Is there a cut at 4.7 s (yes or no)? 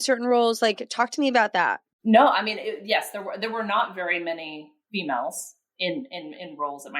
no